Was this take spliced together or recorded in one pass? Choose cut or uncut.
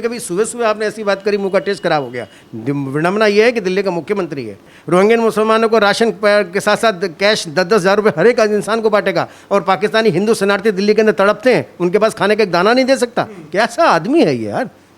cut